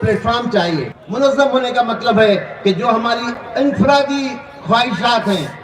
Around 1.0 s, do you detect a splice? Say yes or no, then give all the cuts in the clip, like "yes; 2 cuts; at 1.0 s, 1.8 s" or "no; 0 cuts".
yes; 1 cut; at 1.0 s